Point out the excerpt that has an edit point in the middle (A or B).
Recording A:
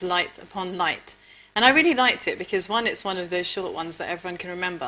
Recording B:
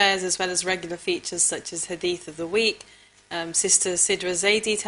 A